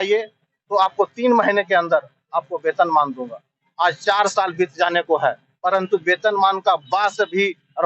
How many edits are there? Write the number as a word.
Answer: zero